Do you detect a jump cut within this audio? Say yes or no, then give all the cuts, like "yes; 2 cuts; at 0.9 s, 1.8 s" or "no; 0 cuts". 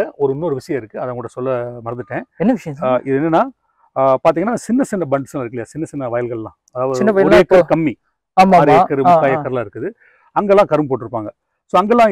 no; 0 cuts